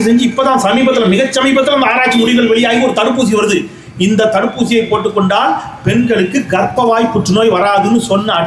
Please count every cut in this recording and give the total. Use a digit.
0